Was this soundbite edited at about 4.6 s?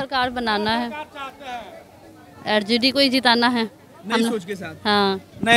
no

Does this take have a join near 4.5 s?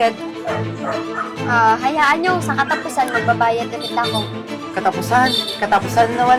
no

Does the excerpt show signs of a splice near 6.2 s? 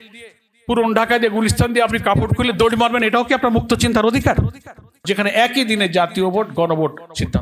no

